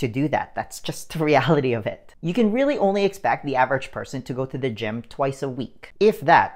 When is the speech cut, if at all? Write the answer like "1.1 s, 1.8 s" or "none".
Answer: none